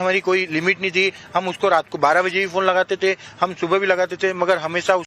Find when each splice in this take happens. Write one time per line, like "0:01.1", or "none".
none